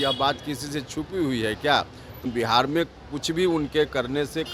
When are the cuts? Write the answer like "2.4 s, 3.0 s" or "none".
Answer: 2.2 s